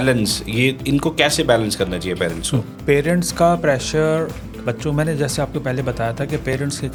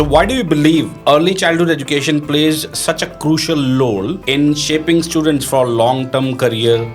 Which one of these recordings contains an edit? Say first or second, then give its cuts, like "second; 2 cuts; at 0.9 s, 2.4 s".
second; 2 cuts; at 0.9 s, 4.2 s